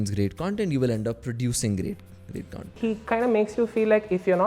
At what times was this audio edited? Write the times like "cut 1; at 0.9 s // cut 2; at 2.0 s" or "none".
cut 1; at 2.7 s

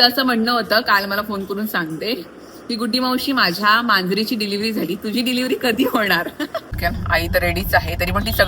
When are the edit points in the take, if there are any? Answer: cut 1; at 6.7 s

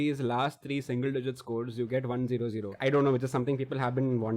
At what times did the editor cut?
cut 1; at 2.6 s

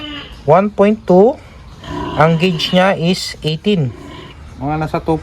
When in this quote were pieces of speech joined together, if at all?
cut 1; at 4.0 s

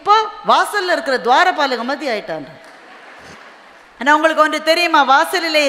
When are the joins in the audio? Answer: none

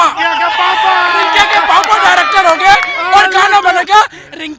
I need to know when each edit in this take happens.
none

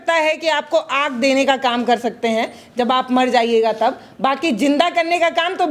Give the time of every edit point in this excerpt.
none

